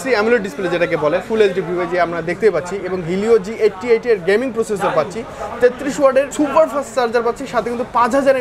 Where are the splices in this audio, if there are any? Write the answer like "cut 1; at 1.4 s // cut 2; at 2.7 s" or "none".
none